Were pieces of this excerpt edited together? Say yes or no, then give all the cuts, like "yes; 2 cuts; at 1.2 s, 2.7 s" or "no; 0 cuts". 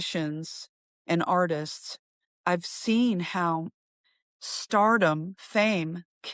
no; 0 cuts